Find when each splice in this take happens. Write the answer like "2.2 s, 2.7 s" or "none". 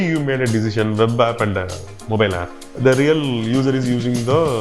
2.7 s